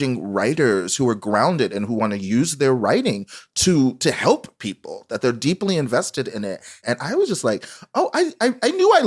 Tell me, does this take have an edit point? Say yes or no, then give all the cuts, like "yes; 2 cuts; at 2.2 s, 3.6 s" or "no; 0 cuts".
yes; 1 cut; at 6.8 s